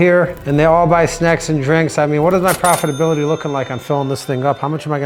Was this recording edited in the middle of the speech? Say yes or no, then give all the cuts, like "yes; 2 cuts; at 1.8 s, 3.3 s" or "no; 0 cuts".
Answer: no; 0 cuts